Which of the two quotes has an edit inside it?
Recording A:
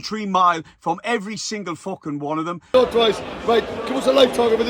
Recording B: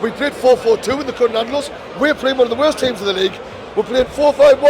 A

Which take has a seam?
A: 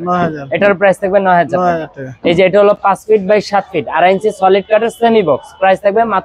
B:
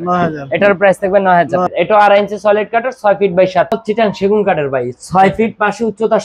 B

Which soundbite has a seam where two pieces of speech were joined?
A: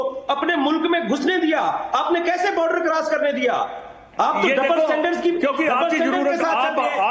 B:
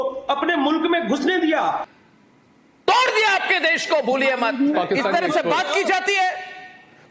B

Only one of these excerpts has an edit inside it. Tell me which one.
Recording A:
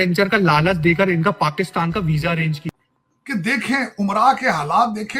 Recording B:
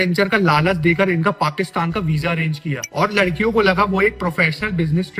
A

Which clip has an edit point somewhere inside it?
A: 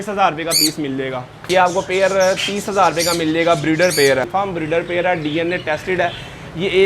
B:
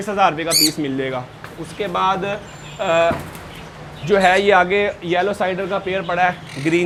A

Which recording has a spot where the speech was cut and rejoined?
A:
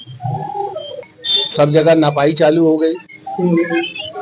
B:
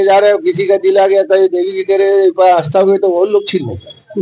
A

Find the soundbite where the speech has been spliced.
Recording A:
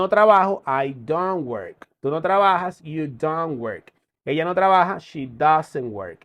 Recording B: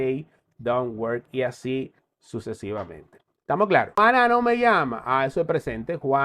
B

